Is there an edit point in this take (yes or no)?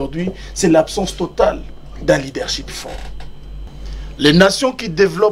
yes